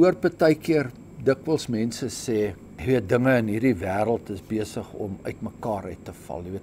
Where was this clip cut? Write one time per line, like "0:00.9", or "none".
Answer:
0:02.7